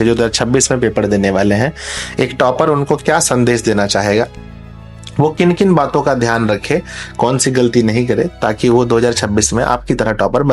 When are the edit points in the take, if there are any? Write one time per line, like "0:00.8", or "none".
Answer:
none